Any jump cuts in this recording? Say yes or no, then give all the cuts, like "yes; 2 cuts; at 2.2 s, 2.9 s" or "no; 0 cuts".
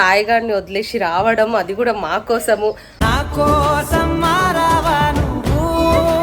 no; 0 cuts